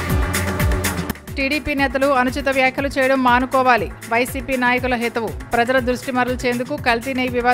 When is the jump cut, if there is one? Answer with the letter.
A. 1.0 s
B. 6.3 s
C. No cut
A